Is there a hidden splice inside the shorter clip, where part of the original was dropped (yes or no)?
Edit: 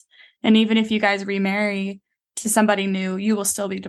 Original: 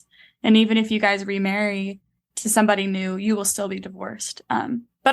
no